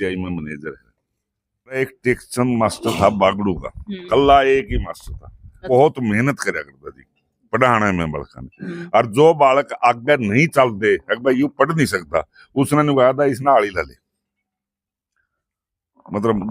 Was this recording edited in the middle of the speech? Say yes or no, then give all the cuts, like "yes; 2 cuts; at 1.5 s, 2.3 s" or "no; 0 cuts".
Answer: yes; 2 cuts; at 1.8 s, 5.6 s